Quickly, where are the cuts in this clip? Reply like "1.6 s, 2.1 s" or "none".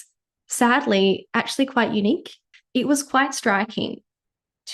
2.5 s